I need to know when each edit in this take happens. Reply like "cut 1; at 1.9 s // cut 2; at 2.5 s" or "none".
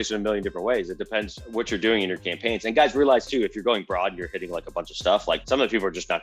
cut 1; at 1.4 s // cut 2; at 5.4 s

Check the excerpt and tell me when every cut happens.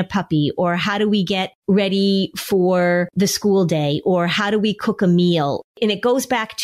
cut 1; at 1.5 s // cut 2; at 3.1 s // cut 3; at 5.7 s

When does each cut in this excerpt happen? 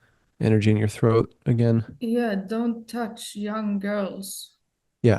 cut 1; at 1.9 s

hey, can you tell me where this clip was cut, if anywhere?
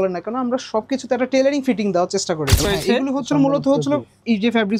cut 1; at 2.6 s

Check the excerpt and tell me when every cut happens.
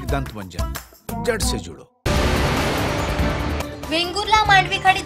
cut 1; at 1.6 s

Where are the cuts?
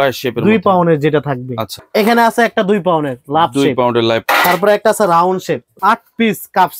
cut 1; at 1.8 s // cut 2; at 4.2 s // cut 3; at 5.7 s

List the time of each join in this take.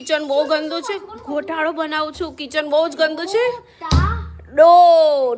none

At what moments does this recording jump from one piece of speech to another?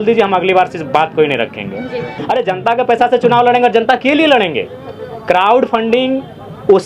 cut 1; at 2.1 s

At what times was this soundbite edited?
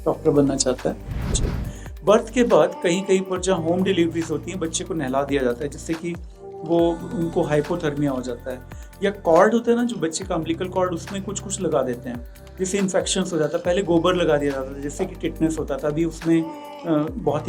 cut 1; at 1.3 s

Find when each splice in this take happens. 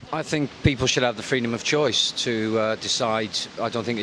none

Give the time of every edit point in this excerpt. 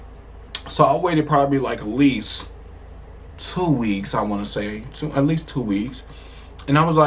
none

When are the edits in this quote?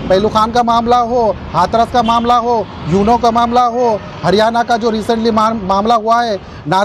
none

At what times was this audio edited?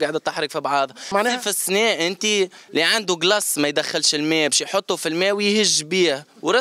cut 1; at 1.1 s

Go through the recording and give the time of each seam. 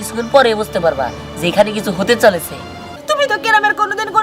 cut 1; at 2.9 s

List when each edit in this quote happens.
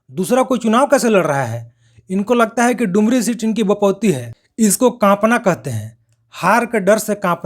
cut 1; at 4.3 s

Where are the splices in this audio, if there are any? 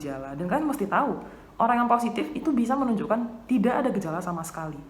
none

